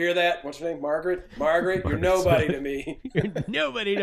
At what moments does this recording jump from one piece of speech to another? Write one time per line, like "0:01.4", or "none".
none